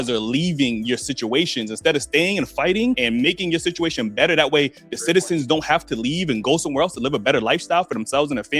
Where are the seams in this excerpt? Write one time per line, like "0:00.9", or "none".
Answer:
0:04.9